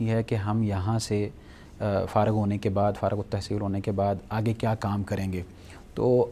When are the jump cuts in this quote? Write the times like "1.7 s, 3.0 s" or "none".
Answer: none